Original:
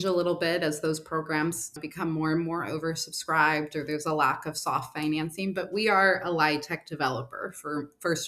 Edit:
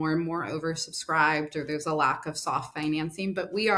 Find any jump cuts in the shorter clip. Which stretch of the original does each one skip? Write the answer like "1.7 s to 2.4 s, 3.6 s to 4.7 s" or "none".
none